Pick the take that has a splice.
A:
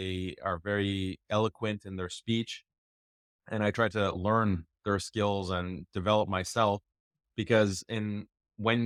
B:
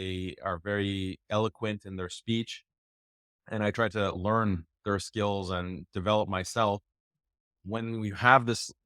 B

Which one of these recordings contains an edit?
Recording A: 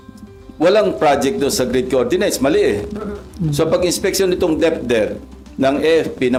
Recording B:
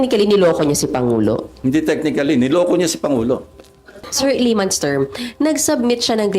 B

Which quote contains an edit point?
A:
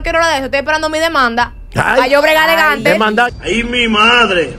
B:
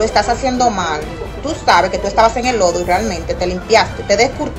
A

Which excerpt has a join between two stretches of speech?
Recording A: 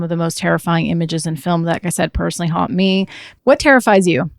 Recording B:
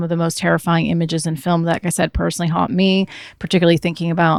A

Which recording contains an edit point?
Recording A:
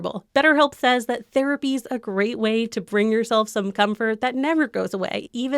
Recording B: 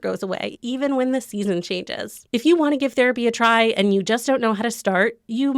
B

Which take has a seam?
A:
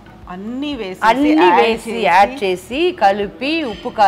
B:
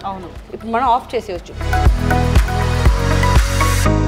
B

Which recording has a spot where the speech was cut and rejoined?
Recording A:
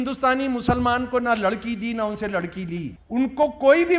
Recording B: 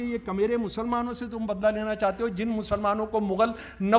A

